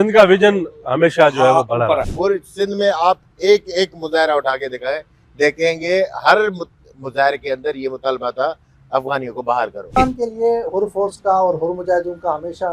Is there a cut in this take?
yes; 2 cuts; at 2.1 s, 10.0 s

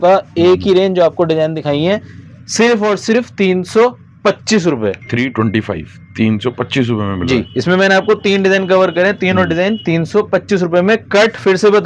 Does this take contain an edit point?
no; 0 cuts

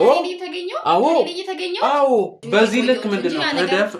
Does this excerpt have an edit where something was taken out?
yes; 1 cut; at 2.4 s

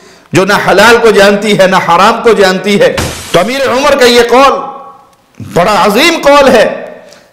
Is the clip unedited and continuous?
no; 1 cut; at 3.1 s

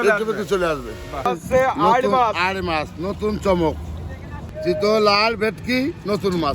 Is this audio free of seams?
no; 2 cuts; at 1.3 s, 4.5 s

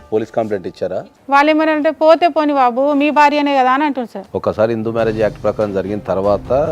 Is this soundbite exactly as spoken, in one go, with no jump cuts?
no; 2 cuts; at 1.0 s, 4.2 s

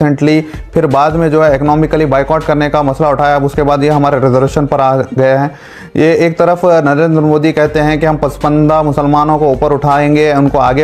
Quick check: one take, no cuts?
yes; 0 cuts

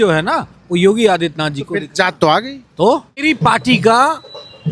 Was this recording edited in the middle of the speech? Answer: yes; 1 cut; at 3.2 s

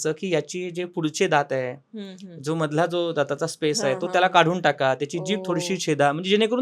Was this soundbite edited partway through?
no; 0 cuts

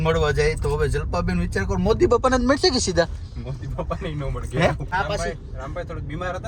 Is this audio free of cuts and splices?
no; 1 cut; at 4.8 s

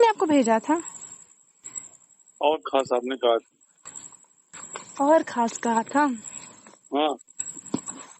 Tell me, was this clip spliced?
yes; 1 cut; at 2.9 s

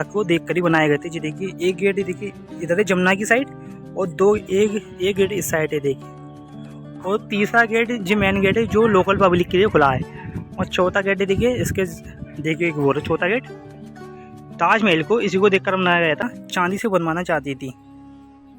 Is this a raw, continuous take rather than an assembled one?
no; 1 cut; at 16.2 s

